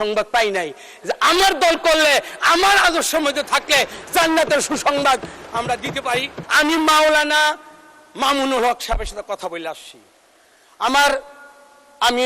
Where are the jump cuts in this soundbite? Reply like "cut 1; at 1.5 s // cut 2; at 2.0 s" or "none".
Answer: cut 1; at 6.4 s